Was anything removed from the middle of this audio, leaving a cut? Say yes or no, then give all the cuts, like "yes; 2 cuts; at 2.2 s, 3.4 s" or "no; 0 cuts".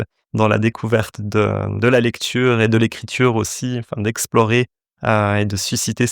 no; 0 cuts